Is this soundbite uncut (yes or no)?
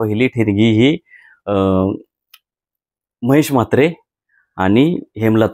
yes